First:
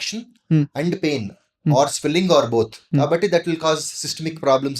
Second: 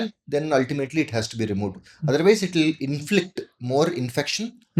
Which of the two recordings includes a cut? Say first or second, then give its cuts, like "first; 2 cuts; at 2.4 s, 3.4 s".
first; 1 cut; at 2.9 s